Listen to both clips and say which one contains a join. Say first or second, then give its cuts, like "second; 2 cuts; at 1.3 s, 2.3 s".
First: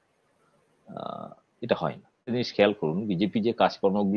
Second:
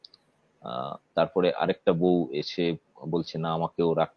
first; 1 cut; at 2.3 s